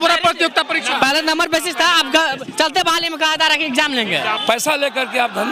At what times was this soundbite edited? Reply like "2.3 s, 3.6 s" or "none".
4.4 s

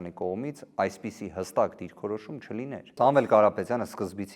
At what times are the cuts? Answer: 3.0 s

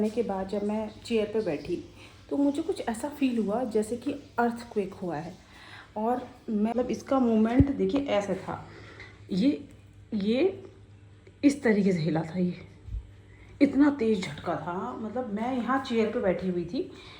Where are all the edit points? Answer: 6.7 s

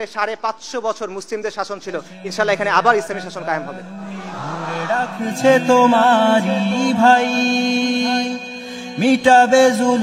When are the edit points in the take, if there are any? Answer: 4.7 s

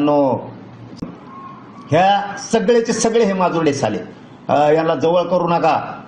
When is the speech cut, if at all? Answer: 0.9 s

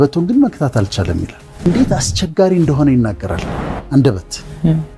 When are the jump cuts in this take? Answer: 1.7 s

